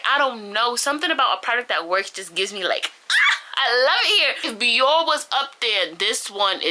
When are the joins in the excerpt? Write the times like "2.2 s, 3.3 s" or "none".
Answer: 4.5 s